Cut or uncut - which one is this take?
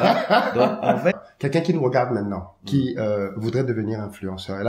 cut